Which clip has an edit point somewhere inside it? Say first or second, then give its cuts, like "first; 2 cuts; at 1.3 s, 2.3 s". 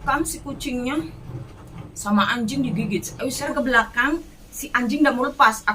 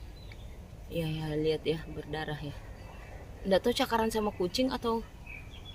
first; 1 cut; at 3.5 s